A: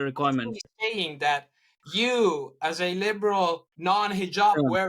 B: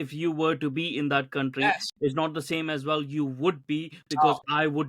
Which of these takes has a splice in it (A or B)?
A